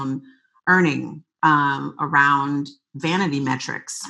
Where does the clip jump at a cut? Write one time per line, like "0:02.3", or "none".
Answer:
none